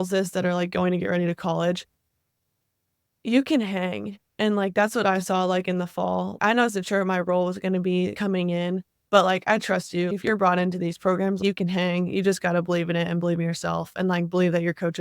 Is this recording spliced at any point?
yes; 5 cuts; at 2.1 s, 6.4 s, 8.1 s, 10.1 s, 11.4 s

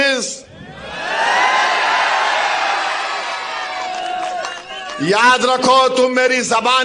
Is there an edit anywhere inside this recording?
no; 0 cuts

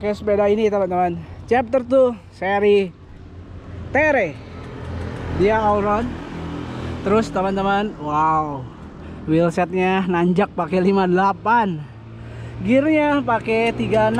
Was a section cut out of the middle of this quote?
no; 0 cuts

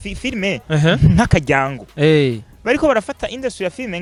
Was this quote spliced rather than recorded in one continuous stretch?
no; 0 cuts

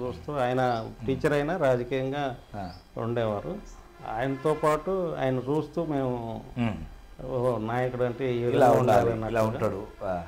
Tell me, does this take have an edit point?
no; 0 cuts

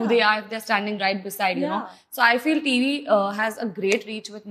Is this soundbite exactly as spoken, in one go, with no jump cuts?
yes; 0 cuts

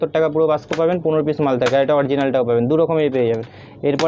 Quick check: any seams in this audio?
no; 0 cuts

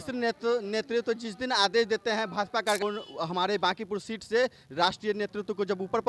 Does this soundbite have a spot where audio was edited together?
yes; 1 cut; at 2.8 s

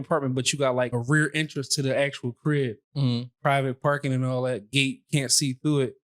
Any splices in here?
yes; 1 cut; at 0.9 s

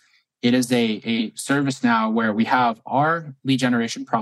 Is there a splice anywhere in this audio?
no; 0 cuts

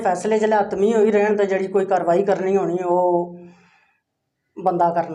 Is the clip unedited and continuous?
yes; 0 cuts

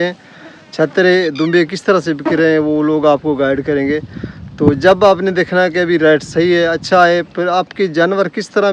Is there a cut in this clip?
no; 0 cuts

